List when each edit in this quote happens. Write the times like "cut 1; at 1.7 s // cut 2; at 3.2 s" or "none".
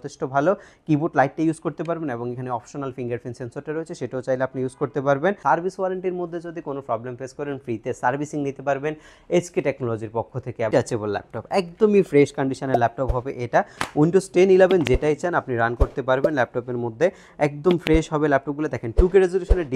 cut 1; at 5.4 s // cut 2; at 10.7 s